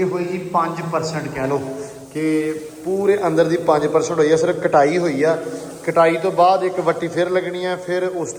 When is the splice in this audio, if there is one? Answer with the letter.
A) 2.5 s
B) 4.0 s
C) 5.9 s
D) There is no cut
D